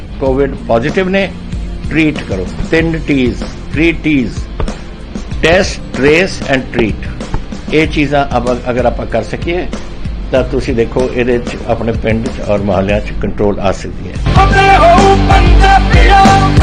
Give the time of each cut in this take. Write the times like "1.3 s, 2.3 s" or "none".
none